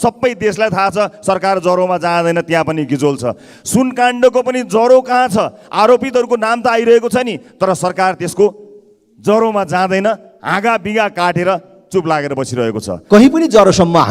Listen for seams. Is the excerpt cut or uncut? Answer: cut